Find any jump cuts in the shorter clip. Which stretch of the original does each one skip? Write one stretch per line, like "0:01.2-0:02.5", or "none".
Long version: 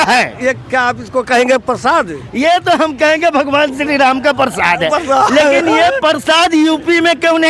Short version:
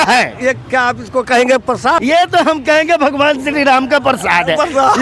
0:02.0-0:02.3